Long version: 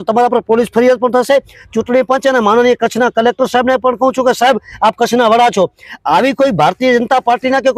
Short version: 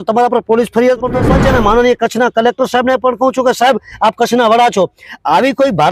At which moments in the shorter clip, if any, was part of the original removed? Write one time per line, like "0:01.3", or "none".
0:01.2